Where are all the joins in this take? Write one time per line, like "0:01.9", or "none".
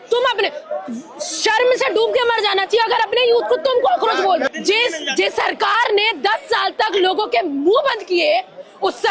0:04.5